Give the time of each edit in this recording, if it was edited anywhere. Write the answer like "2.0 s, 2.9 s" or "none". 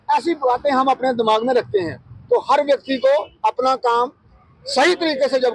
none